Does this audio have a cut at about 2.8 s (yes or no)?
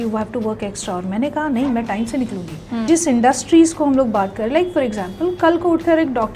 yes